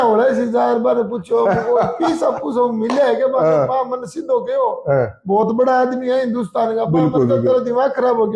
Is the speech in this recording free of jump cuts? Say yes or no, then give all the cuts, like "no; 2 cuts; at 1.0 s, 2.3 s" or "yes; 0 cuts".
yes; 0 cuts